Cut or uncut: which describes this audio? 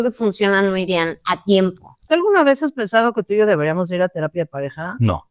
cut